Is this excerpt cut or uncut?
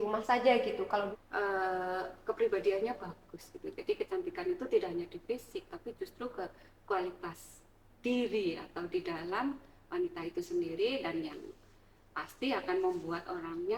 cut